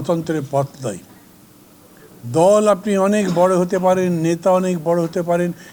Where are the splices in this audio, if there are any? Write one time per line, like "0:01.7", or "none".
none